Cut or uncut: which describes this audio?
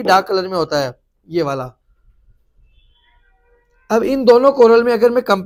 uncut